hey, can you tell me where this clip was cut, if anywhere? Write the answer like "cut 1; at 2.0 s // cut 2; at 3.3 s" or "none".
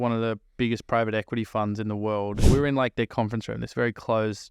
cut 1; at 2.4 s